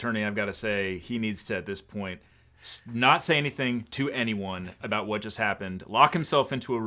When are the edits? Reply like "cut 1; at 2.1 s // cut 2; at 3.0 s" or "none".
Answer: none